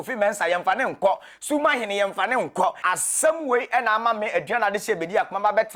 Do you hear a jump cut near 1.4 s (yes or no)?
no